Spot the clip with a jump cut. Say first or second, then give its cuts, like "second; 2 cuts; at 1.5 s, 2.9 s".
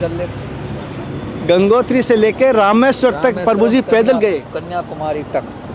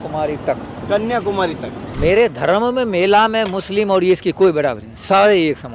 second; 1 cut; at 1.9 s